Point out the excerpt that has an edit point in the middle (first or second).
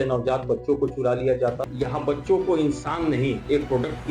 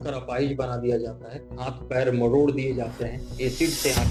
first